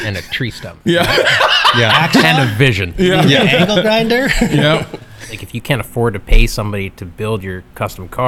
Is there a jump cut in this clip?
yes; 2 cuts; at 2.2 s, 5.3 s

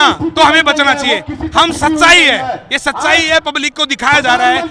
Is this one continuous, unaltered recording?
yes; 0 cuts

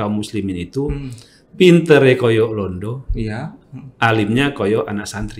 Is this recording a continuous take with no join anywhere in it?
yes; 0 cuts

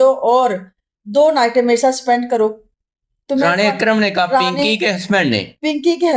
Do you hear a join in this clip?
no; 0 cuts

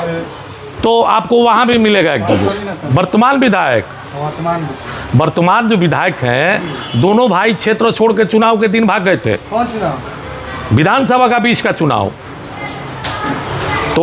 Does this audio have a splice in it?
yes; 1 cut; at 2.8 s

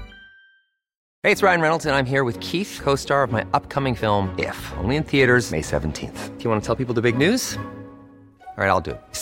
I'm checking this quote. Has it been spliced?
yes; 1 cut; at 1.0 s

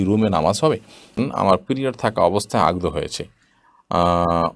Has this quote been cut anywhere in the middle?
yes; 1 cut; at 1.2 s

